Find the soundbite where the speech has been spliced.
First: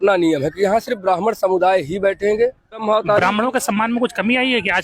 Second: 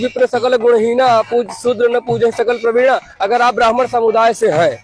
first; 1 cut; at 2.8 s

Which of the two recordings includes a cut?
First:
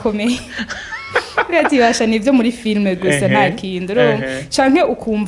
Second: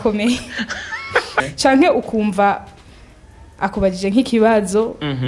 second; 1 cut; at 1.4 s

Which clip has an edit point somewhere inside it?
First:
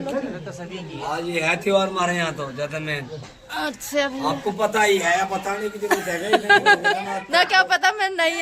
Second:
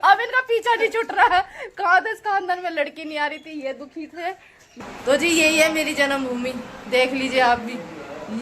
second; 1 cut; at 4.8 s

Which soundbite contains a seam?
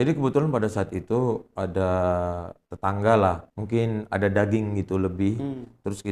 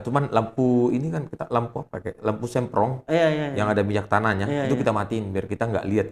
first; 1 cut; at 3.5 s

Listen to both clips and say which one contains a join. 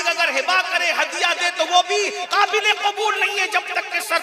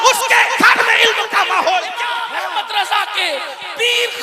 second; 1 cut; at 1.9 s

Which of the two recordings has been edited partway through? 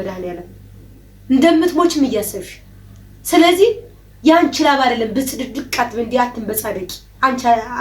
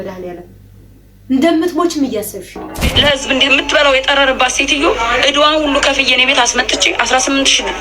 second; 1 cut; at 2.9 s

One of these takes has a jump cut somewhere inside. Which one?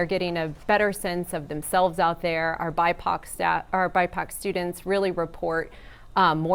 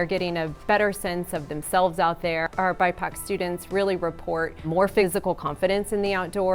second; 2 cuts; at 2.5 s, 4.9 s

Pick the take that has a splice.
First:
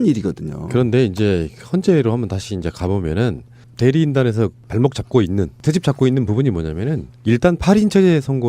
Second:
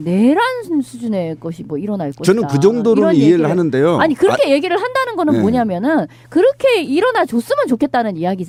first; 1 cut; at 7.2 s

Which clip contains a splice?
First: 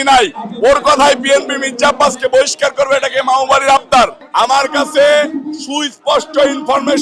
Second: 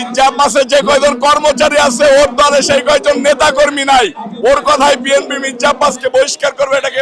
first; 1 cut; at 4.2 s

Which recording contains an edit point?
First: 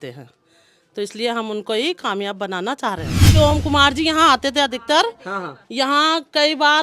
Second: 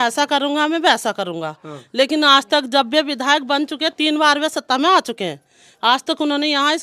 first; 1 cut; at 3.3 s

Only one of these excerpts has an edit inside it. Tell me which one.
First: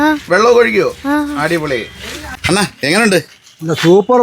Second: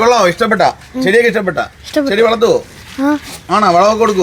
first; 1 cut; at 2.4 s

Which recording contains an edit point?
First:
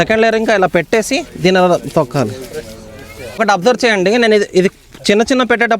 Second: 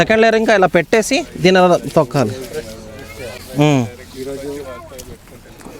first; 1 cut; at 3.4 s

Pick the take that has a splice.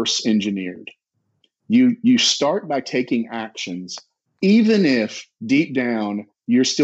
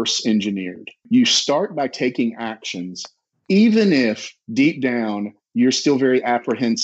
second; 1 cut; at 1.1 s

